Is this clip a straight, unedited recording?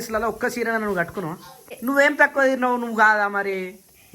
no; 1 cut; at 1.8 s

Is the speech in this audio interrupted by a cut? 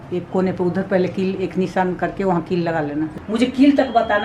yes; 1 cut; at 3.2 s

